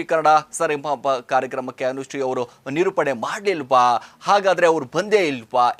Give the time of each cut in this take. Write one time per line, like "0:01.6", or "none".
none